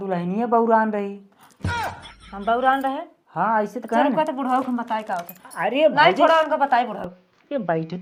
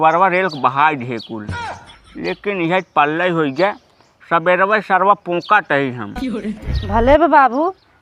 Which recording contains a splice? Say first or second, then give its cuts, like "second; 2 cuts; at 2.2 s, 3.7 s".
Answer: second; 1 cut; at 6.7 s